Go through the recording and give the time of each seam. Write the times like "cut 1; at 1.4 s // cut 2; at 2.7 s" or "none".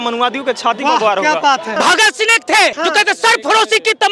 cut 1; at 1.7 s // cut 2; at 2.8 s